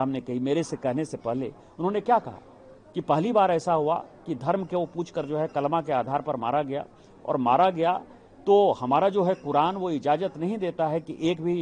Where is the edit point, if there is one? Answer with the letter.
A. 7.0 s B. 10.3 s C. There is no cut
C